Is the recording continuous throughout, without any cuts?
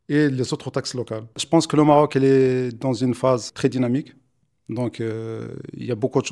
no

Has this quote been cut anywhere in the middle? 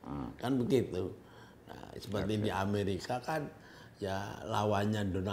no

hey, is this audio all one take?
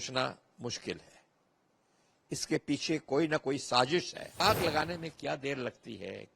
no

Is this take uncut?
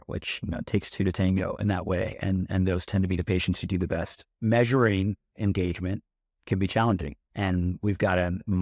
yes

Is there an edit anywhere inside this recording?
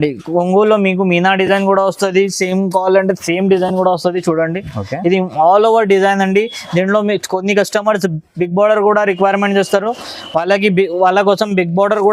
no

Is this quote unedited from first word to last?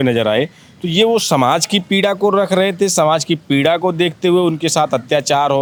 yes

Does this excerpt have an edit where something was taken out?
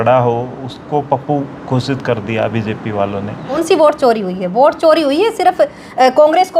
yes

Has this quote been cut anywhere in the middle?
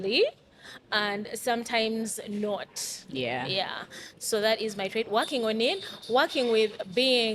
no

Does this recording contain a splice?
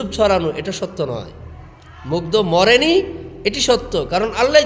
no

